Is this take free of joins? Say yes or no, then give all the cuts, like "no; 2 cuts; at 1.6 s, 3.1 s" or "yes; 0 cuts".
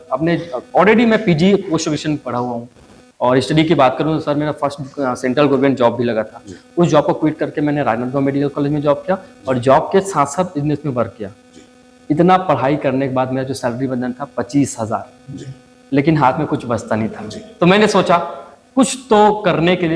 yes; 0 cuts